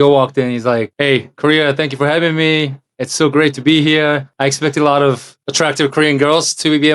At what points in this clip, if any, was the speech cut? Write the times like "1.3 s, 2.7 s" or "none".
0.9 s, 4.3 s, 5.3 s